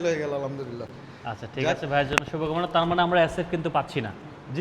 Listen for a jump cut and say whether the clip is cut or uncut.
uncut